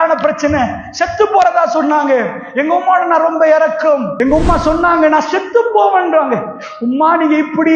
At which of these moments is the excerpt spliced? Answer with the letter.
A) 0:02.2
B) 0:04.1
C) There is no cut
B